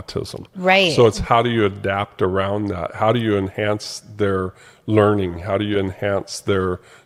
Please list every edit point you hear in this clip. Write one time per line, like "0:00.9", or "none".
none